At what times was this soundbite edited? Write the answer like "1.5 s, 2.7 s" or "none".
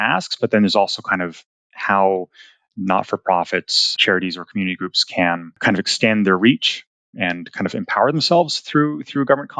4.0 s